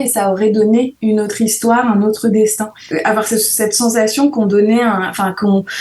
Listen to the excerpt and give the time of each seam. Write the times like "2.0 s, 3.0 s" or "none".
2.8 s